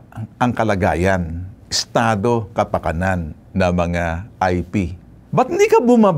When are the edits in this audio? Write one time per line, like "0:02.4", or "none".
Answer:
none